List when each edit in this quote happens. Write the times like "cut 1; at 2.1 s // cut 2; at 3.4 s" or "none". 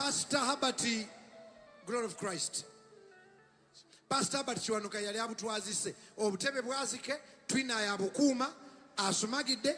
cut 1; at 6.4 s